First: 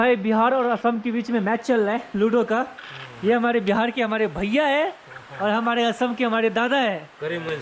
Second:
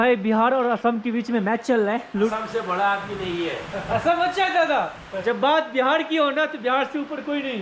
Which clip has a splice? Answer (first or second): second